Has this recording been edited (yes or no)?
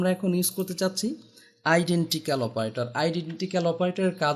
no